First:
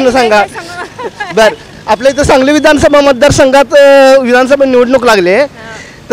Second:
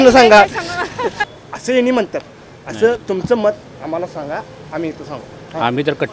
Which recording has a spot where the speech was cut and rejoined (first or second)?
second